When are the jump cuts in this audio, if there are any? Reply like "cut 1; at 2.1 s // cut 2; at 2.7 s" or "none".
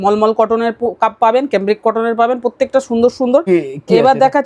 cut 1; at 3.4 s